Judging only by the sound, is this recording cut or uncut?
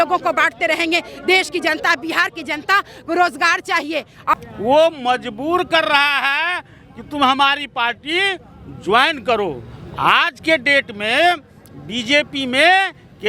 cut